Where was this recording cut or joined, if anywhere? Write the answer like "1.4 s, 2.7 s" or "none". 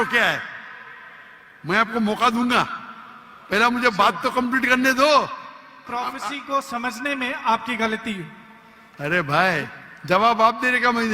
5.8 s

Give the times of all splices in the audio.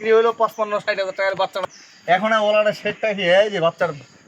1.6 s

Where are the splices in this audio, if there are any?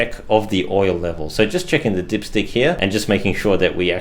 2.8 s

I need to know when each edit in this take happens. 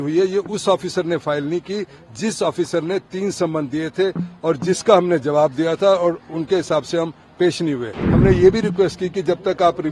8.0 s

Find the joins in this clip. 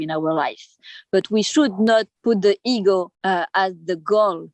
2.1 s, 3.1 s

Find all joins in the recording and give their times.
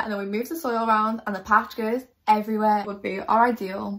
2.9 s

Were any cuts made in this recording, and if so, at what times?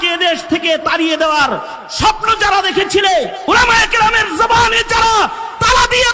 3.4 s

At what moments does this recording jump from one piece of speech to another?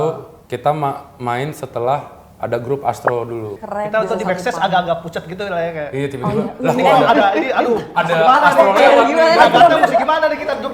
none

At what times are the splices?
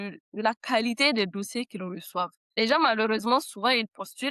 2.4 s

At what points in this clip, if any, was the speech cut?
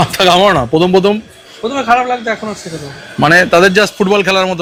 none

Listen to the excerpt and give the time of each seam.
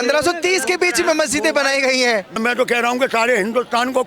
2.3 s

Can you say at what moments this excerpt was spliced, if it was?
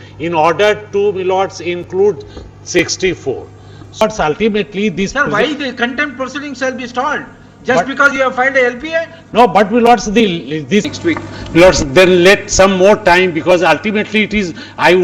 4.0 s, 10.9 s

